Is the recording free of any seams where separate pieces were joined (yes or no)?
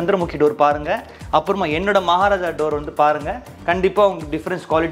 yes